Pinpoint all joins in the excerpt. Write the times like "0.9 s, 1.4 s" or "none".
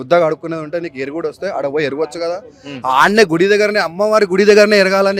none